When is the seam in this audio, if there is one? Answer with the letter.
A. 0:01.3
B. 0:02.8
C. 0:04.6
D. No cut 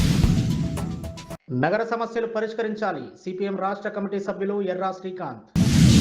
A